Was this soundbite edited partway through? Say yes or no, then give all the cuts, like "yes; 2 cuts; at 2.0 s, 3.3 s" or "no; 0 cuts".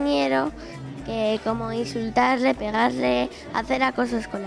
no; 0 cuts